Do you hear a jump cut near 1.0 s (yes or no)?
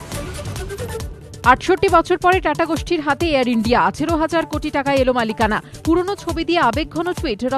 yes